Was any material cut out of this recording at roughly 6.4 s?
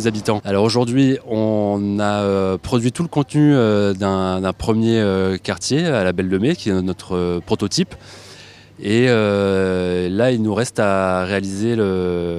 no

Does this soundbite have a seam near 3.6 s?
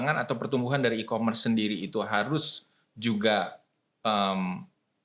no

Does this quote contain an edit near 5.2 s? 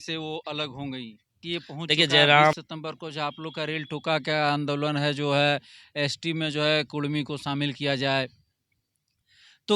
no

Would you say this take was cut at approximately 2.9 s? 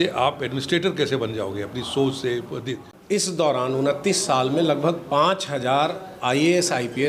yes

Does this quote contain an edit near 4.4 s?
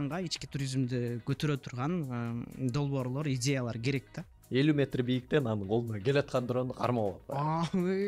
yes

